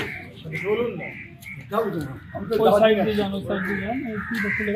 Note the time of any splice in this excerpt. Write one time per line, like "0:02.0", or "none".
none